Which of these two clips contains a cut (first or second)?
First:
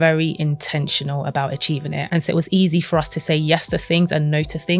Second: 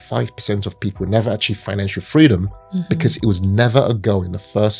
first